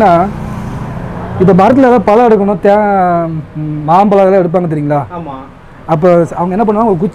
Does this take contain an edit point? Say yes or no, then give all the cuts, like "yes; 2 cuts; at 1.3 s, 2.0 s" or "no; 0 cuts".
no; 0 cuts